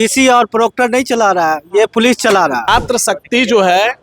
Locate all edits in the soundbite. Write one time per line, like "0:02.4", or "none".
0:02.7